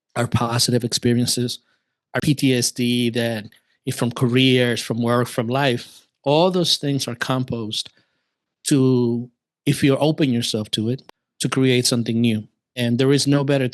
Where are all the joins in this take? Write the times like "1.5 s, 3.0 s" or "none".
2.2 s, 11.0 s, 12.6 s